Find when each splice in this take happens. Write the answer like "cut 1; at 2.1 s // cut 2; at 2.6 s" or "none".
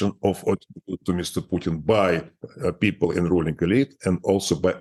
none